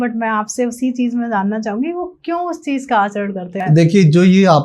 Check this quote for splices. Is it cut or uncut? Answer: cut